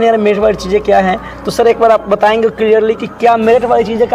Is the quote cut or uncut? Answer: uncut